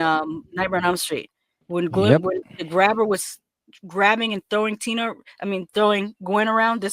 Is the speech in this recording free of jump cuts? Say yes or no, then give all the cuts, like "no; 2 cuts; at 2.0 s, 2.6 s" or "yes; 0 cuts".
yes; 0 cuts